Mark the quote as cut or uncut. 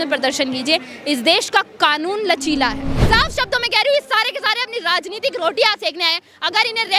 cut